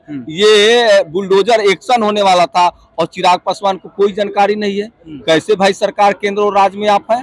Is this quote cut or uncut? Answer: uncut